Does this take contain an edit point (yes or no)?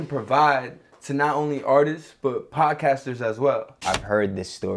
yes